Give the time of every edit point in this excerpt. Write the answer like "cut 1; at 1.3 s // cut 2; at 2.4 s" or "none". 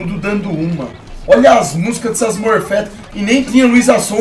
none

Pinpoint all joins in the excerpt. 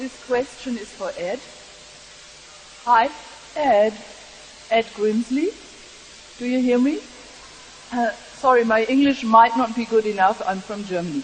none

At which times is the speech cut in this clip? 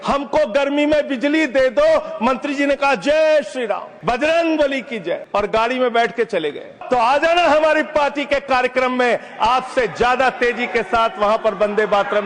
cut 1; at 3.9 s // cut 2; at 5.2 s // cut 3; at 6.8 s

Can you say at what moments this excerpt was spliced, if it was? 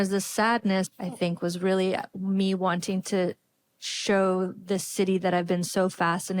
cut 1; at 0.9 s

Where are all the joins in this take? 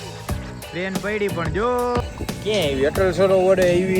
cut 1; at 2.0 s

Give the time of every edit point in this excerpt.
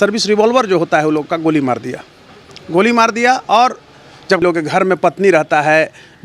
cut 1; at 4.4 s

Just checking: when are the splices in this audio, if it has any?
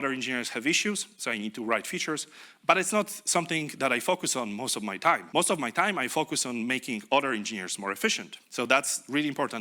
cut 1; at 5.2 s // cut 2; at 8.3 s

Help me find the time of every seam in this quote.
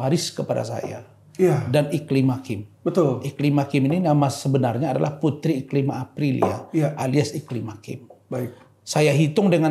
none

